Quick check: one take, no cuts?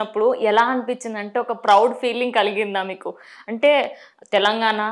yes; 0 cuts

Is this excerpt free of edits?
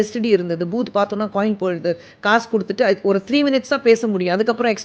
yes; 0 cuts

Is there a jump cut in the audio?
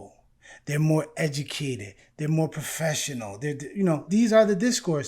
yes; 1 cut; at 4.0 s

